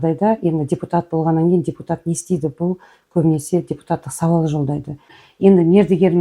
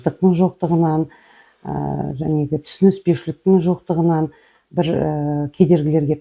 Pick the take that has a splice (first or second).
first